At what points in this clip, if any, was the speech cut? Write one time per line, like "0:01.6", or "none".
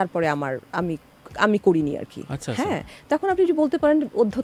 none